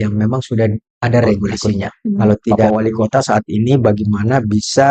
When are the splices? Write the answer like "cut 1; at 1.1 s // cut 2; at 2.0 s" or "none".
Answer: cut 1; at 2.7 s